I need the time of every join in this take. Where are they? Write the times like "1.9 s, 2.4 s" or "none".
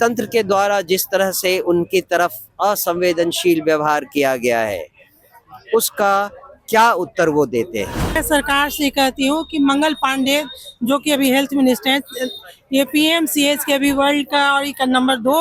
8.2 s